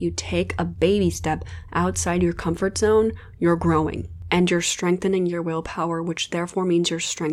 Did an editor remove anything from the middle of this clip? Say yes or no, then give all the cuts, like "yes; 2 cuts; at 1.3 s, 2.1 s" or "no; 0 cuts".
no; 0 cuts